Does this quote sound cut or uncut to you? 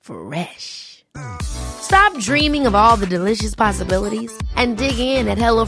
uncut